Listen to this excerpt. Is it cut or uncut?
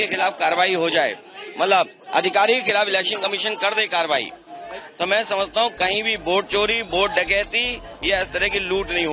uncut